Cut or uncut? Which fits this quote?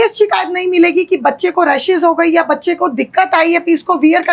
uncut